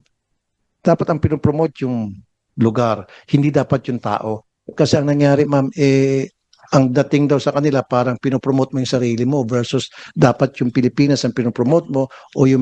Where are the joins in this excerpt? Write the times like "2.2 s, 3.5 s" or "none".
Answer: 4.7 s